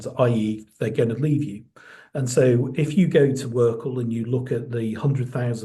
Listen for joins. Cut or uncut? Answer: uncut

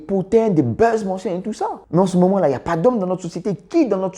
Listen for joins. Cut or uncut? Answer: cut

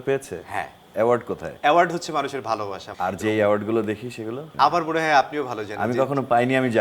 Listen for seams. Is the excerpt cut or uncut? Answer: cut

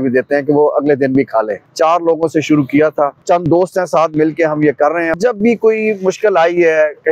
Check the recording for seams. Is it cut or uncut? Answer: cut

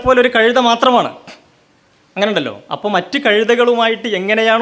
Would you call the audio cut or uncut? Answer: uncut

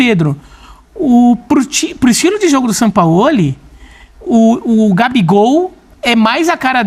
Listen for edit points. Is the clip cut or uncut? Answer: uncut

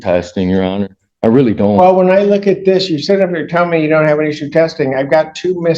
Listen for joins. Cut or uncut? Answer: uncut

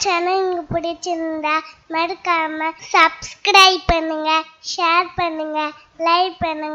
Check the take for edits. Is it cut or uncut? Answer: cut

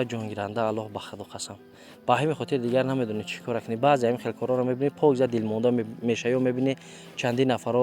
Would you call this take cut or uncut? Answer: uncut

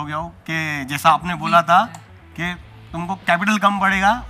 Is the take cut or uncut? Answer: uncut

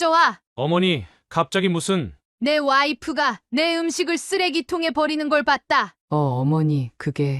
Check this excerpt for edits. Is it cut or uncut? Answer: cut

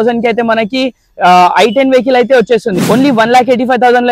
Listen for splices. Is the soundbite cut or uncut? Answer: cut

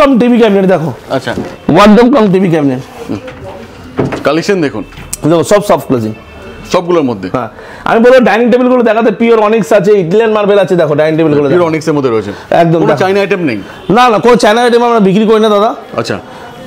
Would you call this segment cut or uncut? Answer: uncut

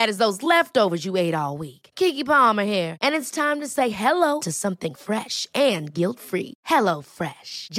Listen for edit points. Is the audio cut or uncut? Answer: uncut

